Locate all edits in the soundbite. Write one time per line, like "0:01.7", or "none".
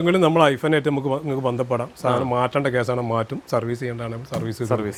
none